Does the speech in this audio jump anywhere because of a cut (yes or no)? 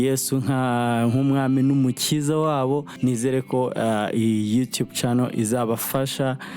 yes